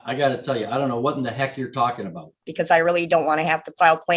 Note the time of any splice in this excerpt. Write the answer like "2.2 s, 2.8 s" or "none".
2.5 s

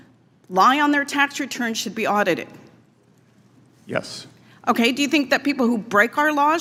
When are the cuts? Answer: none

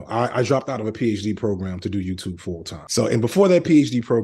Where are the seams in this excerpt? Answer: 3.1 s

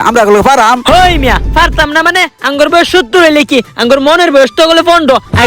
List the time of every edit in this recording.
none

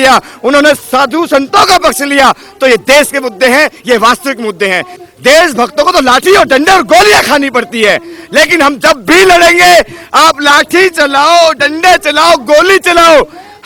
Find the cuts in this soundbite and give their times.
4.9 s

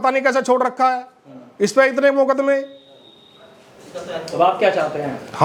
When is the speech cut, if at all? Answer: none

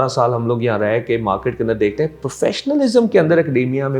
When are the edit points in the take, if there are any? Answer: none

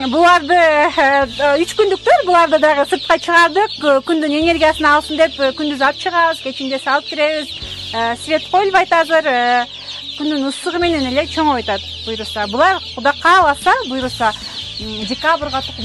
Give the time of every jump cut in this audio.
none

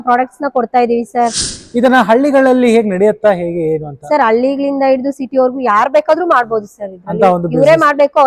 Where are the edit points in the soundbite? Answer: 1.5 s

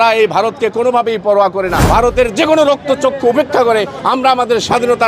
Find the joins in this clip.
1.8 s

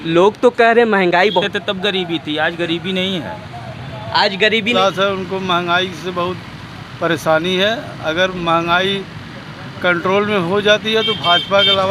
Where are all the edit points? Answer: 1.5 s, 4.8 s

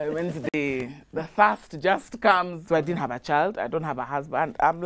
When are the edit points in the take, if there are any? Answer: 2.6 s

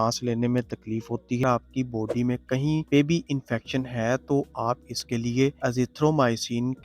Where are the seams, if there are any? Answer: 1.4 s

